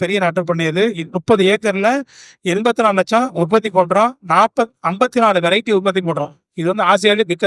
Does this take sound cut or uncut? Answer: uncut